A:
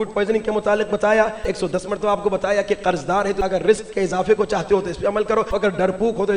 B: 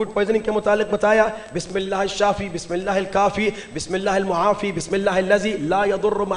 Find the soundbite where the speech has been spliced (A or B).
A